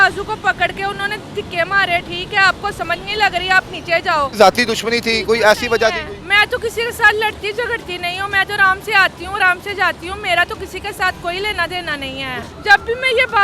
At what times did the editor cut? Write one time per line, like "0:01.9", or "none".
0:04.3
0:12.5